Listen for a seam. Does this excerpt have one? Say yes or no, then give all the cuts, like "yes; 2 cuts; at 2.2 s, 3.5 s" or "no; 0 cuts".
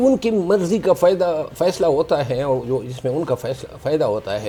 no; 0 cuts